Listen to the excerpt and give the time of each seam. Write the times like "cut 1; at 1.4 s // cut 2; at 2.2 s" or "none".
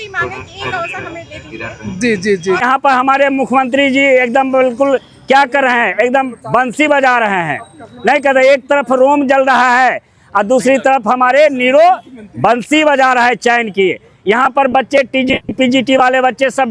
cut 1; at 2.6 s